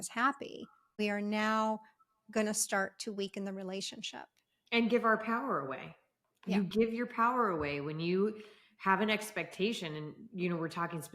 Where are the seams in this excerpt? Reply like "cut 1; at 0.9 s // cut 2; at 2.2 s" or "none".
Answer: cut 1; at 1.0 s